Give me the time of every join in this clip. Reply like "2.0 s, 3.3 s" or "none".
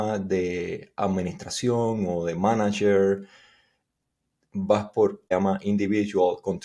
5.3 s